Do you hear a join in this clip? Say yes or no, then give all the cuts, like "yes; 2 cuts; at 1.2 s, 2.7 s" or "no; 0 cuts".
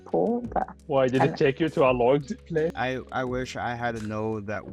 yes; 1 cut; at 2.7 s